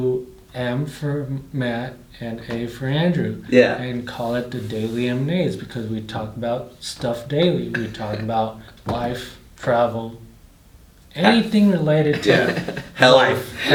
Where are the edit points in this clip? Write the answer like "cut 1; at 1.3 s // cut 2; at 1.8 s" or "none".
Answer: none